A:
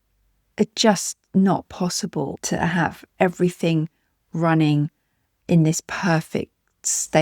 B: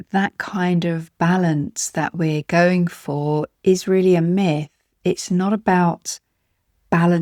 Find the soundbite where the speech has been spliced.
A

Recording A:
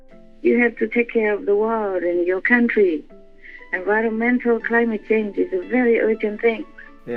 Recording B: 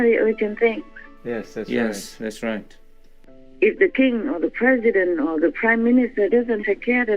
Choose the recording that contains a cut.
B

